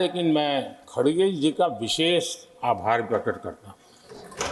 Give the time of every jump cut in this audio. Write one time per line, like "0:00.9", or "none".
none